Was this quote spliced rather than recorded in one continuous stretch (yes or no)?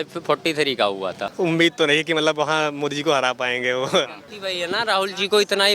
yes